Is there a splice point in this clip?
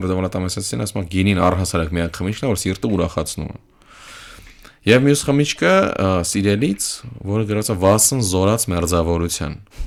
no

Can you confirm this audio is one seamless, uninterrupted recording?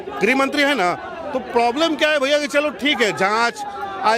yes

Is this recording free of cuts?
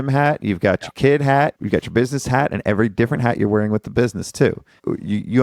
yes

